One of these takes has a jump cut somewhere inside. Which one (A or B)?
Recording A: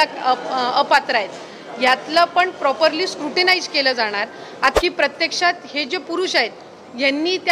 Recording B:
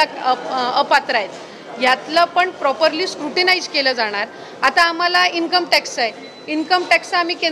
A